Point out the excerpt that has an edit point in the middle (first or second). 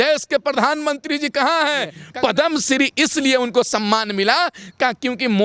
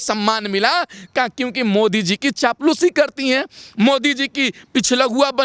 first